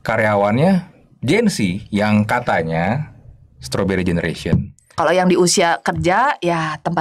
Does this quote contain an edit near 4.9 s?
yes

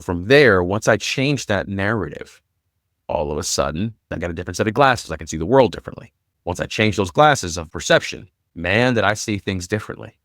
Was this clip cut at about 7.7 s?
yes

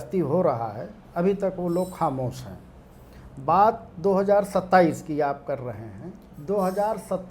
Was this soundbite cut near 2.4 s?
no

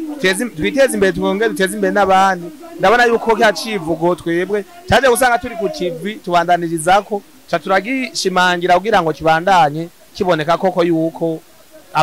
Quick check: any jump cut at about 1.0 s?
no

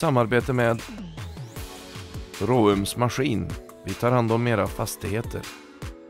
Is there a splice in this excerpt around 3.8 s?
no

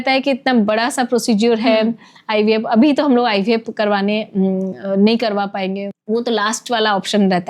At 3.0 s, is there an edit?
no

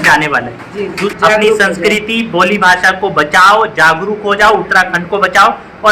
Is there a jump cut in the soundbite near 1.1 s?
yes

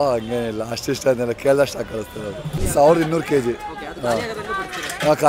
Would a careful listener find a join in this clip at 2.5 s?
yes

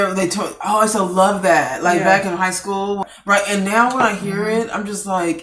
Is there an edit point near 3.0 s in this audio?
yes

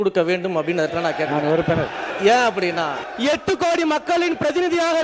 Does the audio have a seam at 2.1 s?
yes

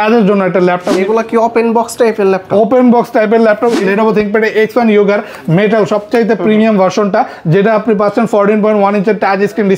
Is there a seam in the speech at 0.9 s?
yes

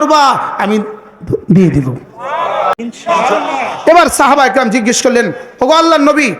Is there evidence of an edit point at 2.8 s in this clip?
yes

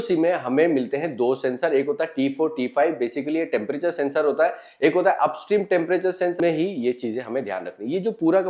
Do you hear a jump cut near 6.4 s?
yes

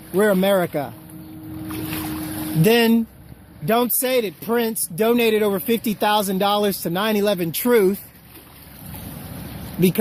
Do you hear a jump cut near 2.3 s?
no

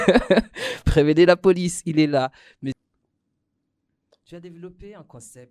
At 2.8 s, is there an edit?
yes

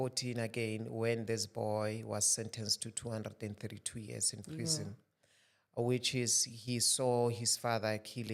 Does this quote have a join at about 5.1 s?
no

